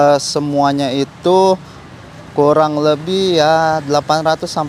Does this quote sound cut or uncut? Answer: uncut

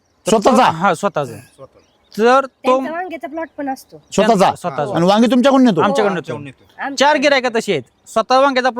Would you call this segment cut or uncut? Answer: uncut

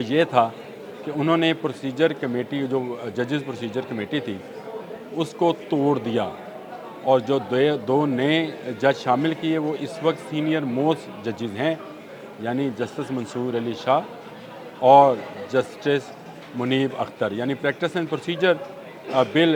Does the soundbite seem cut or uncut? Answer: uncut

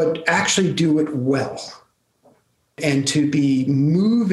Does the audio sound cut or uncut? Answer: cut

